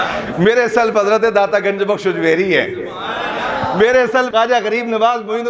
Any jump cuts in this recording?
yes; 1 cut; at 4.3 s

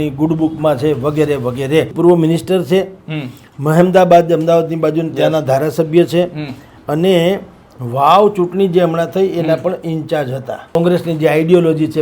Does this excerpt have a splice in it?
yes; 2 cuts; at 1.9 s, 10.8 s

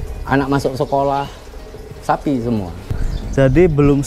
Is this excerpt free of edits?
no; 1 cut; at 2.8 s

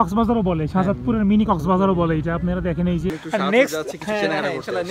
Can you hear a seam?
yes; 1 cut; at 3.2 s

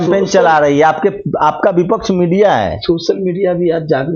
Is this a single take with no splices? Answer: yes; 0 cuts

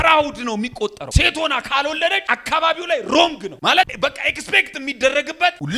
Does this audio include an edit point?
yes; 3 cuts; at 1.0 s, 2.2 s, 3.6 s

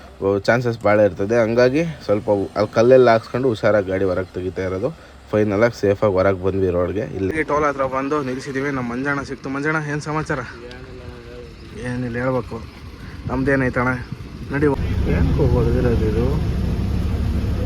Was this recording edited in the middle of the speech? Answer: yes; 2 cuts; at 7.3 s, 14.7 s

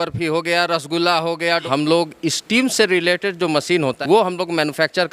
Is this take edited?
yes; 2 cuts; at 1.6 s, 4.0 s

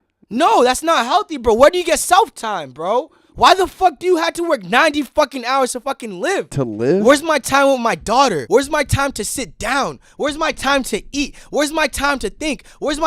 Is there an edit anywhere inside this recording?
yes; 2 cuts; at 6.5 s, 8.4 s

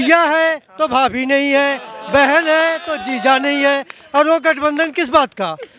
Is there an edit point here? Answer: no; 0 cuts

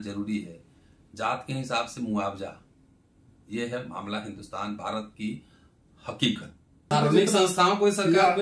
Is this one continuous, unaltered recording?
no; 1 cut; at 6.9 s

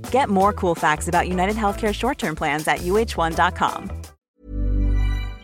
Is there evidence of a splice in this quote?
yes; 1 cut; at 4.3 s

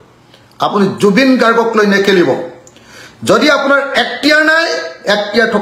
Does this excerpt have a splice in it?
no; 0 cuts

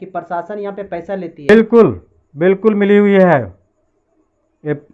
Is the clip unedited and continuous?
no; 1 cut; at 1.5 s

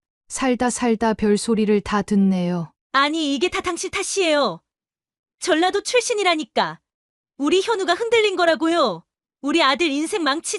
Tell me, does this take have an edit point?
yes; 1 cut; at 2.7 s

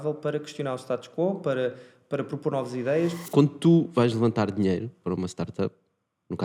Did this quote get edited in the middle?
yes; 1 cut; at 3.3 s

